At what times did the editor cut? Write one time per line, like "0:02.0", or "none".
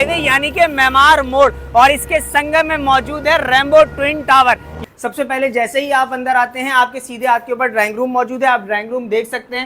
0:04.7